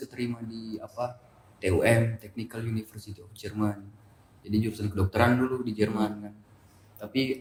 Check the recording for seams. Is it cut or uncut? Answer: uncut